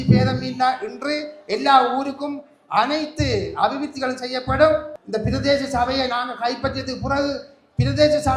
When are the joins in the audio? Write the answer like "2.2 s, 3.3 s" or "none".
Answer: 5.0 s

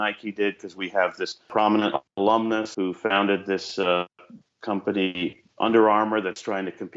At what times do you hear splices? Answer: 1.5 s, 2.7 s

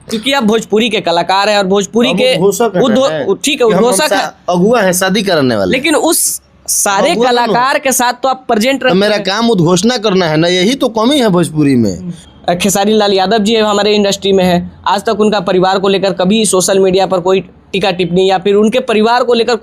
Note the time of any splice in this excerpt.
12.2 s

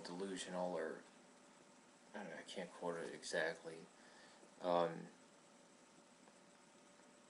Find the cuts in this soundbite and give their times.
4.8 s

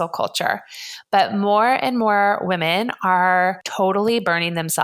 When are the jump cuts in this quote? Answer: 3.6 s

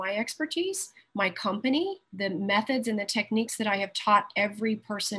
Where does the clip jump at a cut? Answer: 2.1 s

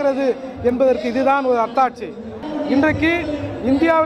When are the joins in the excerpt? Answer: 2.4 s

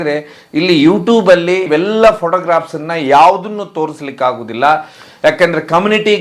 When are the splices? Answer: none

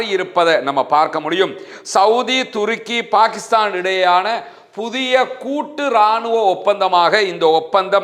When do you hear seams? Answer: none

